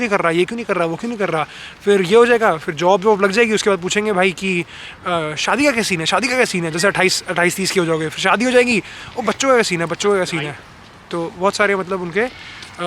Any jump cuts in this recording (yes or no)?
no